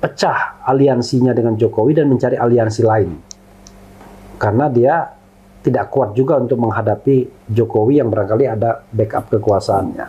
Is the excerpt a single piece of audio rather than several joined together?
yes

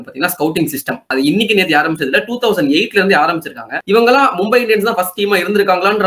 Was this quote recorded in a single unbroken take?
no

